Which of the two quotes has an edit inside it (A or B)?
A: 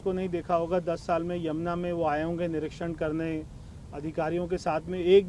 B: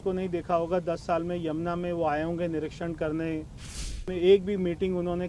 B